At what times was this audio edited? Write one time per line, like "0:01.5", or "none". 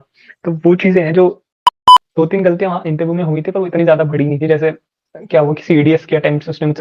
0:01.9